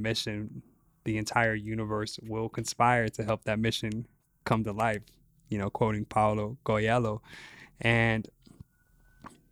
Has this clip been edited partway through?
no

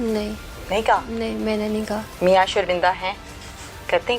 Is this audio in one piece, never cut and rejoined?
no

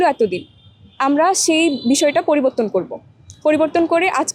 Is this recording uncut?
yes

